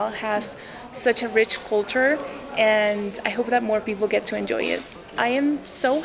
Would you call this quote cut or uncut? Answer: uncut